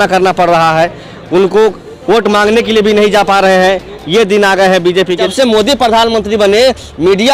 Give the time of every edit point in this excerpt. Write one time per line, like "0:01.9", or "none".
0:05.3